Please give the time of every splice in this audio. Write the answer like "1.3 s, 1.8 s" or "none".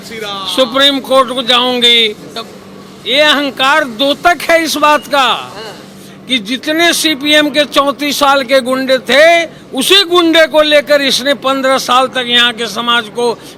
none

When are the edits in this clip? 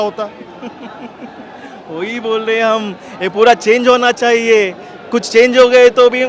none

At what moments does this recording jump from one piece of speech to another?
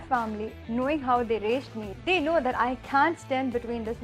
1.8 s

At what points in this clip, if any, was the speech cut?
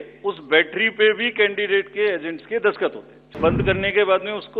3.6 s

